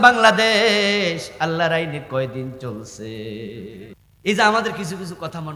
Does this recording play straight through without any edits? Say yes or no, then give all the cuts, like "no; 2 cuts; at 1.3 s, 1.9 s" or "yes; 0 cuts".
no; 1 cut; at 4.0 s